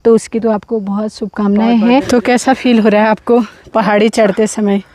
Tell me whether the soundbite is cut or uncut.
cut